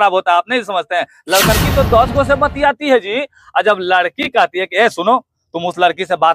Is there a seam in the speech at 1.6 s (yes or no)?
yes